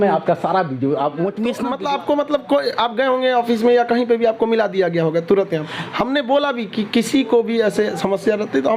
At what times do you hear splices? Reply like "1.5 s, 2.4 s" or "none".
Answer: 1.6 s